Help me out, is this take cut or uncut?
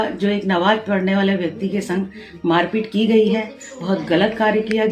uncut